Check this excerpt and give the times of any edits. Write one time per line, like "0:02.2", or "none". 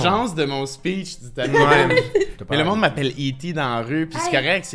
0:02.4